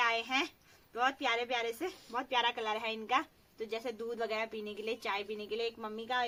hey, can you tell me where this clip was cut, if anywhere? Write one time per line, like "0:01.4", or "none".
none